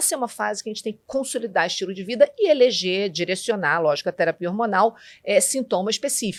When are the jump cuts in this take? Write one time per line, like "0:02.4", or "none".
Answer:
none